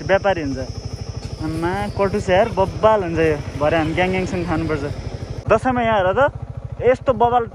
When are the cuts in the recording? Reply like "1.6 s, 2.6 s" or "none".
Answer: 5.3 s